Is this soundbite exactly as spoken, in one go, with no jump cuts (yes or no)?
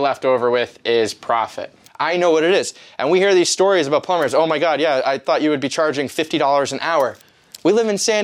no